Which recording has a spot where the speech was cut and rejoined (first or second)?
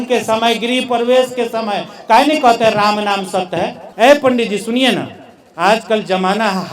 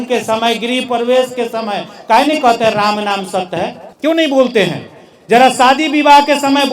first